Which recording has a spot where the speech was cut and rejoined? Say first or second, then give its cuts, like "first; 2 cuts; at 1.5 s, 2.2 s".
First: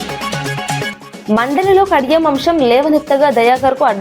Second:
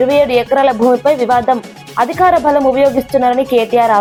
first; 1 cut; at 0.9 s